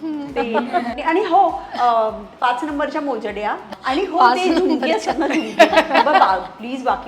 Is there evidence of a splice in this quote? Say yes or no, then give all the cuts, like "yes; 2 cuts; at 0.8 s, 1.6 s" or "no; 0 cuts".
yes; 2 cuts; at 0.9 s, 3.6 s